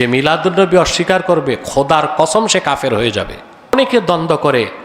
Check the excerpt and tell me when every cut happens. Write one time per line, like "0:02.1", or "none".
0:03.7